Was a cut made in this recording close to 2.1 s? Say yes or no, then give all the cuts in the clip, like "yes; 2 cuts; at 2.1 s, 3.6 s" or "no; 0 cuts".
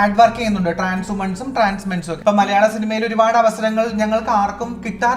yes; 1 cut; at 2.1 s